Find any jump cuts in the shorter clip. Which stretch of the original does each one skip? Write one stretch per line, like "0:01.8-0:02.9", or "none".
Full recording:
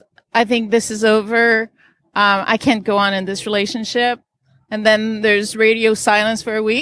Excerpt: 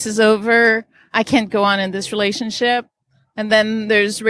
0:01.9-0:02.4